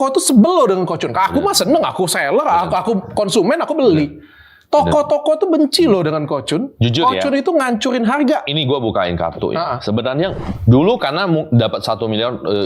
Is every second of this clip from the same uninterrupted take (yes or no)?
no